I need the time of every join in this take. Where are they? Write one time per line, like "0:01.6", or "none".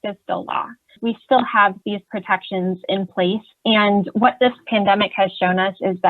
0:01.0

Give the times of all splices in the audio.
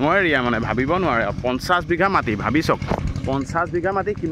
none

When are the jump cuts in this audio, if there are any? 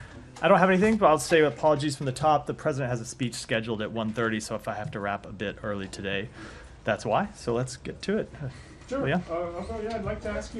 0:04.1
0:09.1

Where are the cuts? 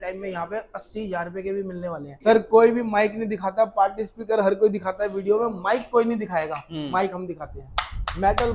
0:02.2

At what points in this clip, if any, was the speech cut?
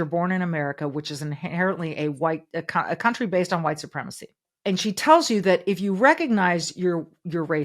0:04.5

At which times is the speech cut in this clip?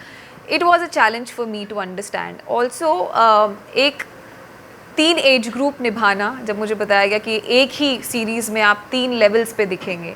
none

